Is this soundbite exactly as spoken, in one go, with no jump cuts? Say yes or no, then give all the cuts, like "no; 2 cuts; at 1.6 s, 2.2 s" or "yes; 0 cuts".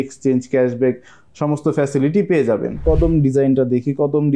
no; 1 cut; at 2.8 s